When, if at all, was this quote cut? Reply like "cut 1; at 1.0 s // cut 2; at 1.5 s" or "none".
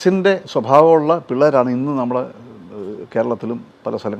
none

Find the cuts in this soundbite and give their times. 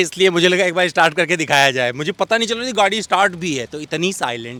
none

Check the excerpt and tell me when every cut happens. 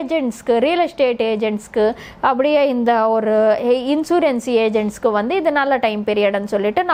none

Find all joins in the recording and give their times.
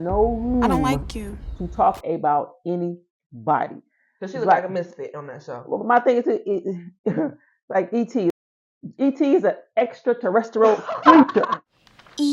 cut 1; at 8.3 s // cut 2; at 11.5 s

